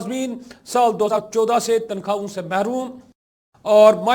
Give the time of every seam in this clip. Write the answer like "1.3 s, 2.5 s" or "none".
1.1 s